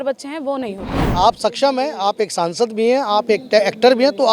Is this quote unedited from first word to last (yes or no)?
no